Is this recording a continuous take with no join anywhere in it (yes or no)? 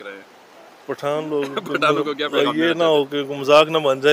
yes